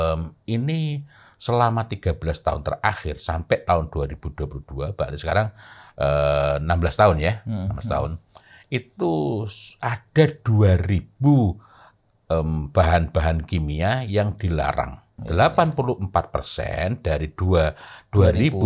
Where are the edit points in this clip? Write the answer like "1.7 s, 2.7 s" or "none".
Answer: 15.1 s